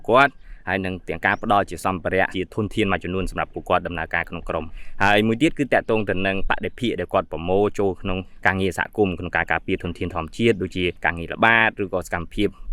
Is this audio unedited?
no; 3 cuts; at 2.3 s, 4.8 s, 8.3 s

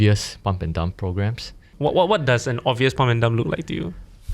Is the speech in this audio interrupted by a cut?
yes; 1 cut; at 1.6 s

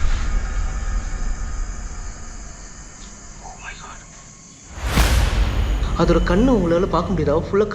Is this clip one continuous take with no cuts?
no; 2 cuts; at 4.6 s, 5.8 s

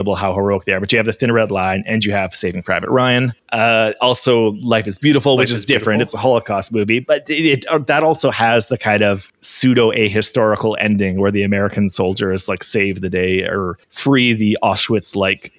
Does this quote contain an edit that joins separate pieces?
no; 0 cuts

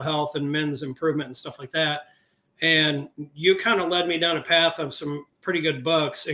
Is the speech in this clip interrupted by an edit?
no; 0 cuts

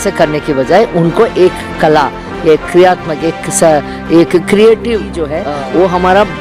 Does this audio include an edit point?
yes; 1 cut; at 5.2 s

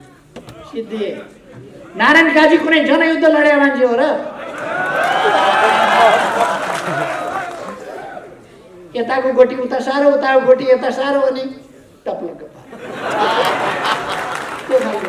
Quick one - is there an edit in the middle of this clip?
no; 0 cuts

